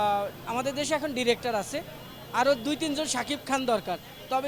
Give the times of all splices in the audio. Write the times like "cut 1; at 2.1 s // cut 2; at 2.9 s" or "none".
none